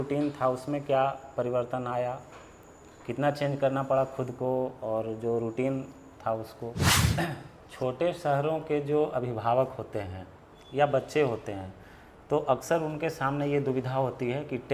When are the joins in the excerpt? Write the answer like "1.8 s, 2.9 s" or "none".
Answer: 6.9 s